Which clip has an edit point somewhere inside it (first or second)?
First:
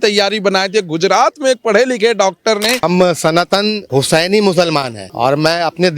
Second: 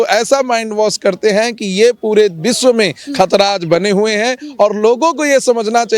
first